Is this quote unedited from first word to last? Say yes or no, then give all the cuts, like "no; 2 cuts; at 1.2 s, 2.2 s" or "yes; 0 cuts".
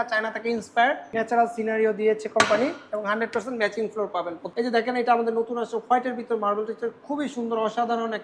no; 2 cuts; at 1.1 s, 4.4 s